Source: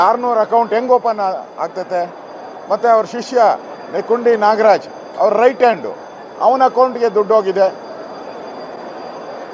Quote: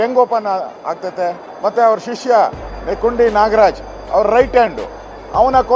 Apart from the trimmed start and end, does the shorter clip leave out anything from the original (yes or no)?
yes